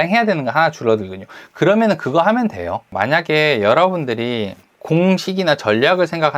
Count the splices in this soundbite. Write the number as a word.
two